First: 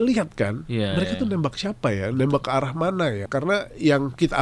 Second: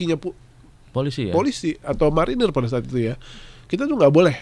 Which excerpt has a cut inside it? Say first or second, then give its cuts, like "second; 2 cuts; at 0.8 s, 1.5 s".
first; 1 cut; at 3.2 s